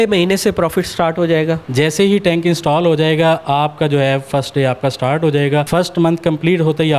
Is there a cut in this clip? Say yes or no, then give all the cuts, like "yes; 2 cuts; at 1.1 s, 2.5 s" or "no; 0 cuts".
yes; 2 cuts; at 1.6 s, 5.7 s